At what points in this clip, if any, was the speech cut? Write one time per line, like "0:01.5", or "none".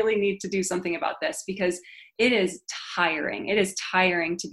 none